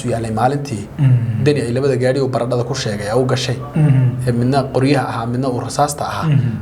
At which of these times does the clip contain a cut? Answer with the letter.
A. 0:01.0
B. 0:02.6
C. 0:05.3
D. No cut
D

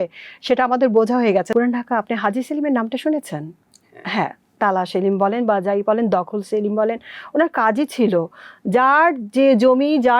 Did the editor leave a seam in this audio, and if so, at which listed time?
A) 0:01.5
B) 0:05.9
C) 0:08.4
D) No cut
A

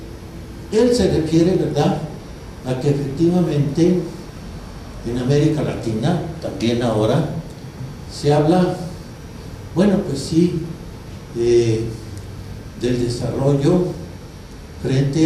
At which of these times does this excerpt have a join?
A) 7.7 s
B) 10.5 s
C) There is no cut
B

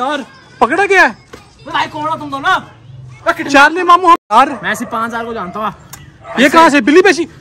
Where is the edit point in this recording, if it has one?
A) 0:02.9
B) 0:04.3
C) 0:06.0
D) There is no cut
B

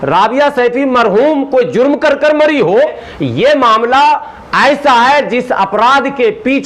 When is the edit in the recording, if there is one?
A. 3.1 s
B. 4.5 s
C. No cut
A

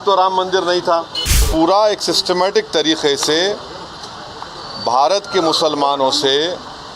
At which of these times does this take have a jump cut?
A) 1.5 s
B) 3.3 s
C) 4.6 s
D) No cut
A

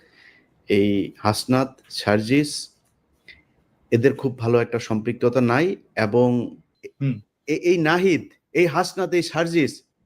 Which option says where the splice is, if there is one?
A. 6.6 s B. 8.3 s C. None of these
A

